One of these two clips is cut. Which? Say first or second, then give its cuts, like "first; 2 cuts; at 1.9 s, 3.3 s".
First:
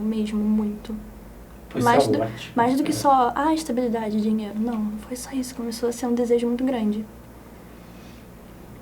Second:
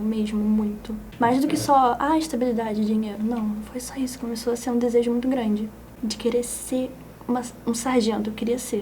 second; 2 cuts; at 1.0 s, 5.8 s